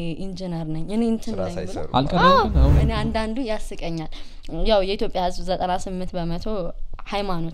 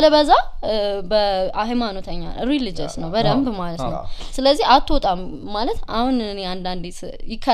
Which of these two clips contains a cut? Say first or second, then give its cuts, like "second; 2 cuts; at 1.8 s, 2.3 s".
first; 1 cut; at 2.8 s